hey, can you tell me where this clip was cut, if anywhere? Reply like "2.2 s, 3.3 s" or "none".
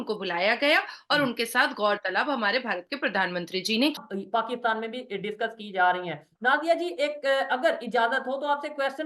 3.9 s